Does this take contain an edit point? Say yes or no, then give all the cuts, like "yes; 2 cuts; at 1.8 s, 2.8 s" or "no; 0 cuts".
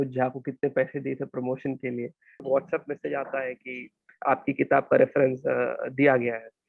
yes; 1 cut; at 2.4 s